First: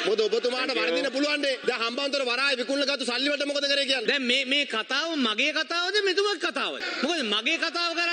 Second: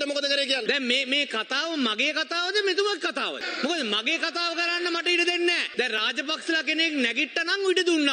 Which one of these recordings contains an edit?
second; 1 cut; at 5.7 s

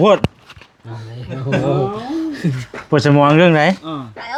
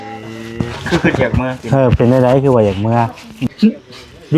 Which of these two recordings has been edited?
second; 1 cut; at 3.3 s

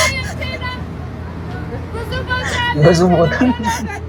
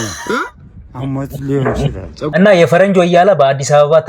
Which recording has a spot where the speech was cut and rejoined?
second; 1 cut; at 2.3 s

